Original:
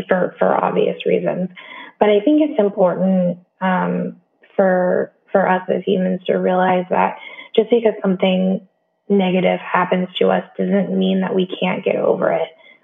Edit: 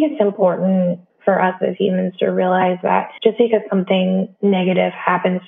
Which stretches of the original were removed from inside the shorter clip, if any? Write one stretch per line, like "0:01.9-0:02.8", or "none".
0:03.5-0:05.2
0:07.2-0:07.4
0:08.6-0:09.0